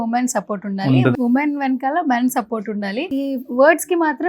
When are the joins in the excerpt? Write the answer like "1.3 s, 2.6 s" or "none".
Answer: 1.1 s, 3.1 s